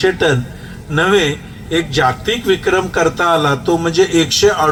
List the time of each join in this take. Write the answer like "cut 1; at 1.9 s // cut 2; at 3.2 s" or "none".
none